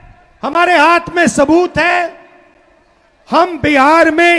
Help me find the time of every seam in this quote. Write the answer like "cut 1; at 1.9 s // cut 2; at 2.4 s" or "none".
none